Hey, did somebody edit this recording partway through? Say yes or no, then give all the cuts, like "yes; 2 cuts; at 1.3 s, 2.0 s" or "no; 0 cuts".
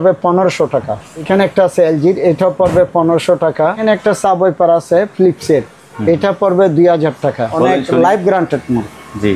yes; 3 cuts; at 1.2 s, 3.8 s, 7.5 s